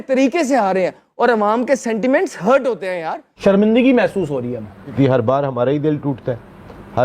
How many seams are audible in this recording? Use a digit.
2